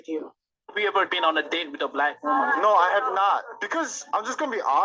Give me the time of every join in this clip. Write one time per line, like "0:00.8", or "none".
0:03.1